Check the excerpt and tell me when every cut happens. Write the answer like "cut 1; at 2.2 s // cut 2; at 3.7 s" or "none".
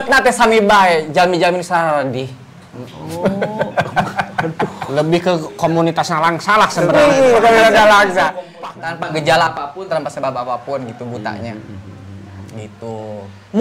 cut 1; at 8.4 s